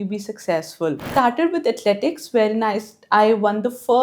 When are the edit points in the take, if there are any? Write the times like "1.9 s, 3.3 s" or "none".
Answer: 1.0 s